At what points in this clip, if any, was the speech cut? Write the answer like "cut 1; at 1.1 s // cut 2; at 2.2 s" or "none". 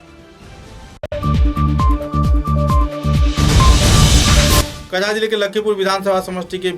cut 1; at 1.1 s // cut 2; at 4.6 s